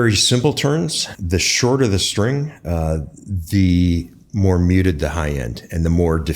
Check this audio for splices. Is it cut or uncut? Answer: cut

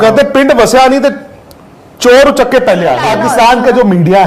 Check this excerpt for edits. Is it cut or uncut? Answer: cut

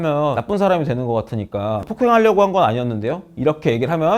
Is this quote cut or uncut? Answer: uncut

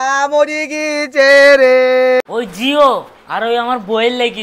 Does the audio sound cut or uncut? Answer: cut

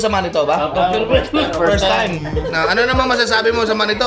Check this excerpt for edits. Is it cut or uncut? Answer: uncut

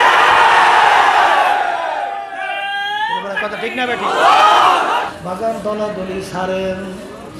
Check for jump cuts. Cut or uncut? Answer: cut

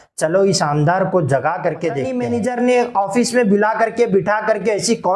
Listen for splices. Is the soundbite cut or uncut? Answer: cut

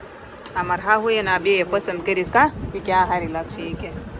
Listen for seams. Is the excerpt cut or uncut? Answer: uncut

